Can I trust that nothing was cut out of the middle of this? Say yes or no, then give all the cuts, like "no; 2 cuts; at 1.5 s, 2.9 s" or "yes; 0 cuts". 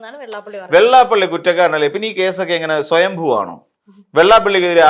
yes; 0 cuts